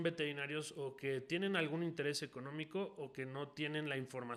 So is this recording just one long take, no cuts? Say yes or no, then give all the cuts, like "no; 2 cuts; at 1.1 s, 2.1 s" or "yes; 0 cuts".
yes; 0 cuts